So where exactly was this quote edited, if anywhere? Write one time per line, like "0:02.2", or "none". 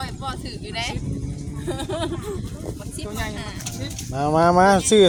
none